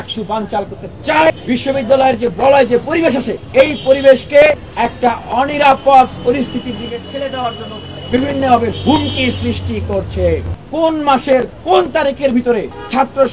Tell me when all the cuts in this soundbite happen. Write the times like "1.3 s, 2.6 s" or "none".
1.3 s, 3.4 s, 7.9 s, 10.6 s

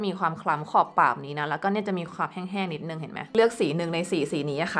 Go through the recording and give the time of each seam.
3.3 s

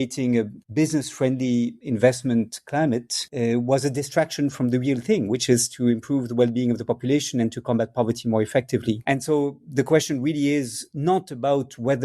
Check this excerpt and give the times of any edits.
9.0 s

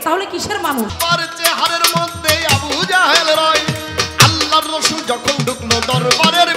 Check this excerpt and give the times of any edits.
0.9 s

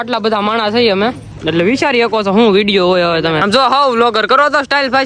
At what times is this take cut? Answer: 1.3 s, 3.4 s

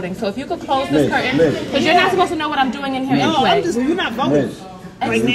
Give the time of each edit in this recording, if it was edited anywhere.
3.7 s

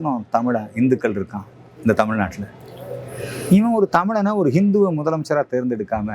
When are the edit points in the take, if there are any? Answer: none

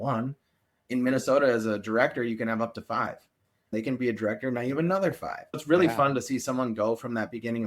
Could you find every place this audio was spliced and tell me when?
3.7 s, 5.6 s

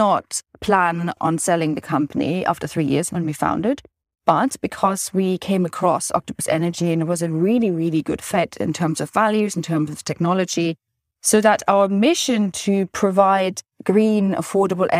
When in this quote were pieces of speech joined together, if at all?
1.2 s

